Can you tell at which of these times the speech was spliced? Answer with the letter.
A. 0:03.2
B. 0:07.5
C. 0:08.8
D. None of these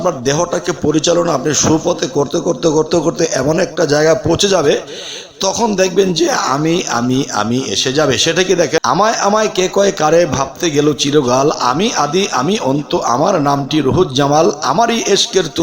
C